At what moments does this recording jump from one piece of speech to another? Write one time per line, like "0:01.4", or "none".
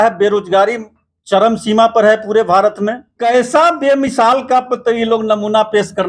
0:03.1